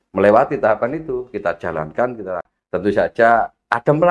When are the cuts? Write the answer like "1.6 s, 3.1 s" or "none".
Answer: 2.6 s